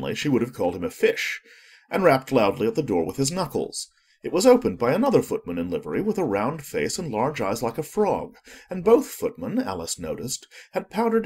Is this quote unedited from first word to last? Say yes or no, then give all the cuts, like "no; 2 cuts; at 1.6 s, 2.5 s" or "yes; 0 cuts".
no; 1 cut; at 6.8 s